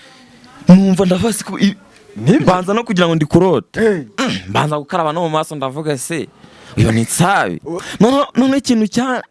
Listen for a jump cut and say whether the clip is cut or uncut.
cut